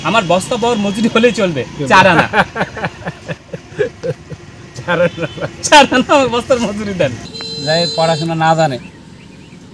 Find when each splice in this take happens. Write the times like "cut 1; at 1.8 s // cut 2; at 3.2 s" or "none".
cut 1; at 7.2 s